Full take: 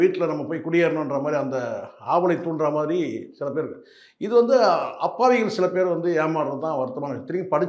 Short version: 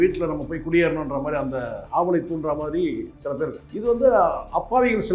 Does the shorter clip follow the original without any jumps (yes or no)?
no